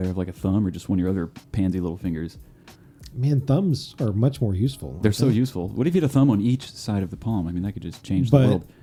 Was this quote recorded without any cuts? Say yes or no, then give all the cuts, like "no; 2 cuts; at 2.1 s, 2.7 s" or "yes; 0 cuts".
yes; 0 cuts